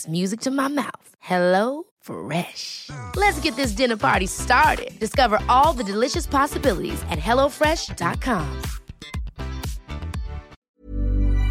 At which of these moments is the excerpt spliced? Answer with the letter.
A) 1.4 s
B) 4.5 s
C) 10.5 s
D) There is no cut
C